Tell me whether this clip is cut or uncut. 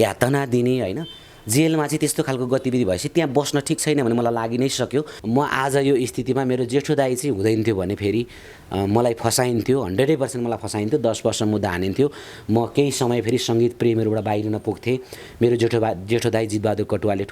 cut